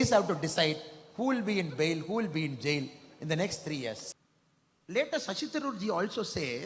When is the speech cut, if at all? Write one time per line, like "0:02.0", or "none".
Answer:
0:04.0

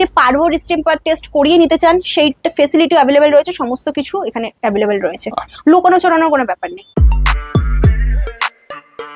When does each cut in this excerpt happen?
none

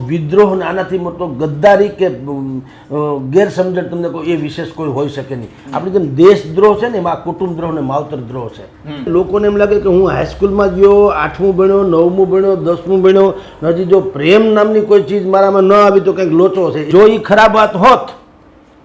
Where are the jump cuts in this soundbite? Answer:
0:09.1
0:16.8

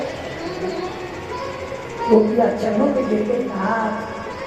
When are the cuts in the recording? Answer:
0:03.5

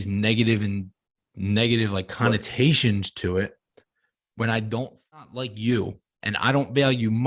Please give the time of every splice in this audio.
0:05.2

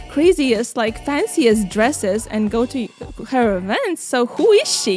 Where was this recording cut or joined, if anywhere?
none

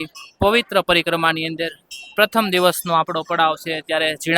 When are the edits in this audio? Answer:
none

